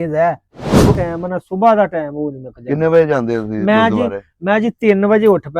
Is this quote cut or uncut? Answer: cut